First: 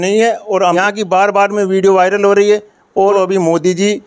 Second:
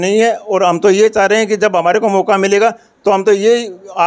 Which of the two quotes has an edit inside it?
first; 2 cuts; at 0.8 s, 3.1 s

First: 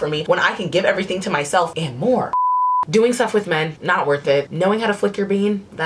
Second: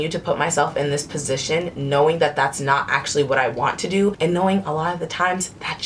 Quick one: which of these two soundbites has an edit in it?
first; 1 cut; at 2.7 s

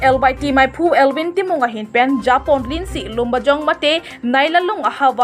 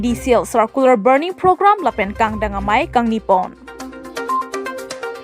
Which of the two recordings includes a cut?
second; 1 cut; at 3.7 s

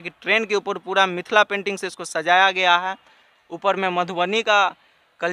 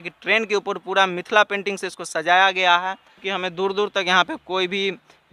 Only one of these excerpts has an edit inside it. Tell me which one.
second; 1 cut; at 3.2 s

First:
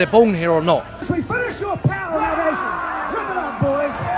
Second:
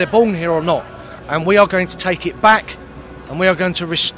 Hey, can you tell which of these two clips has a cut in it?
first; 1 cut; at 1.0 s

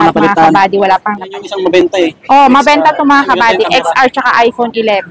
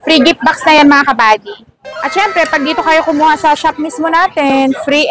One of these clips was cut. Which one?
first; 1 cut; at 1.4 s

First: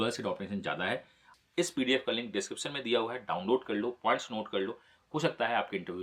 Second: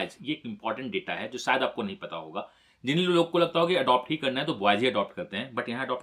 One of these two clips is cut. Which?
first; 1 cut; at 1.3 s

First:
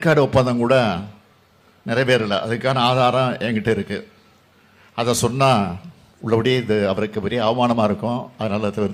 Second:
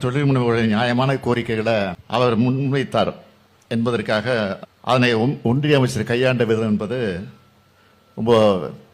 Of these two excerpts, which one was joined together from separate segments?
second; 2 cuts; at 2.0 s, 4.7 s

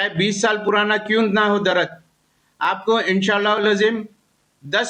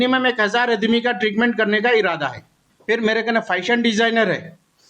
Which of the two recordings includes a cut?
second; 1 cut; at 2.7 s

